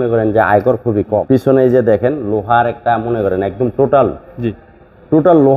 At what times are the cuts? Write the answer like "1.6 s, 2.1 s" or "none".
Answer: 1.2 s